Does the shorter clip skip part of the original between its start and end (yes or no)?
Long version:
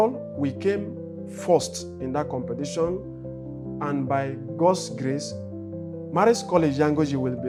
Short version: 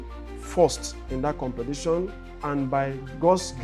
yes